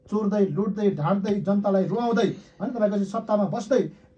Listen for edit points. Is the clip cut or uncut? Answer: uncut